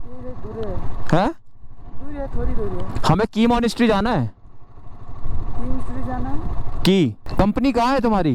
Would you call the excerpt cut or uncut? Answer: cut